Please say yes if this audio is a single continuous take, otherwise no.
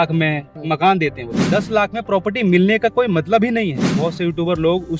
no